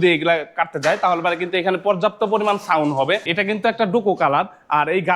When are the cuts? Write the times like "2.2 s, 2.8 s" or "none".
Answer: 3.3 s